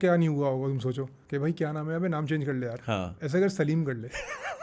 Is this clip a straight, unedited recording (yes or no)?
no